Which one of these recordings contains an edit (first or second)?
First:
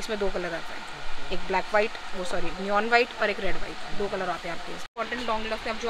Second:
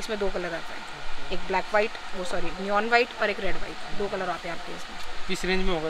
first